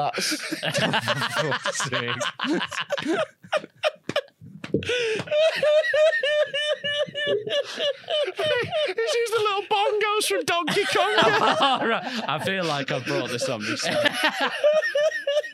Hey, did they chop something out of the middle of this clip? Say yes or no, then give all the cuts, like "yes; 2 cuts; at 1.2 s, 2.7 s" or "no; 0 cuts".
no; 0 cuts